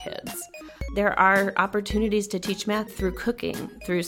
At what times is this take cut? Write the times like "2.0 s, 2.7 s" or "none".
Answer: 0.9 s, 2.9 s

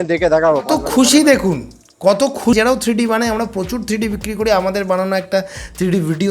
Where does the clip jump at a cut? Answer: 2.5 s

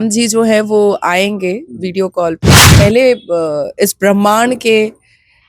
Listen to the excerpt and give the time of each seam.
2.6 s

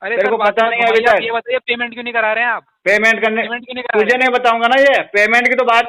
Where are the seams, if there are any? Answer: none

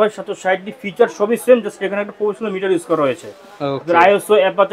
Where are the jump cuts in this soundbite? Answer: none

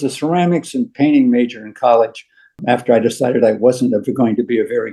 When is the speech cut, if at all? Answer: none

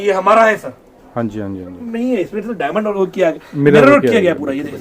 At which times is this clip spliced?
1.8 s

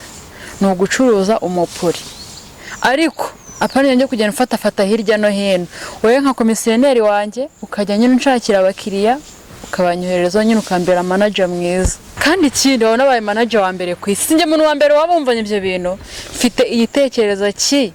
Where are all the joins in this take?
12.0 s

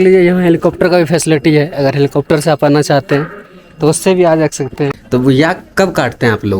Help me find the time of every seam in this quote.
5.0 s

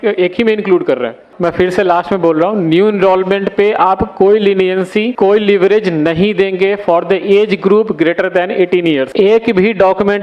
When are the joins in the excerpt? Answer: 1.3 s, 5.1 s, 9.1 s

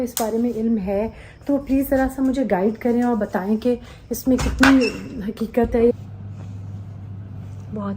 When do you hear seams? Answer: 5.9 s

